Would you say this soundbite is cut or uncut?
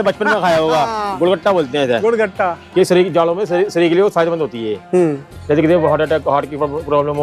cut